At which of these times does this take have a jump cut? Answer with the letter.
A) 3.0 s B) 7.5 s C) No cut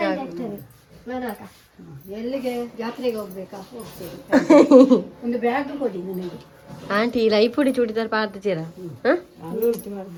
C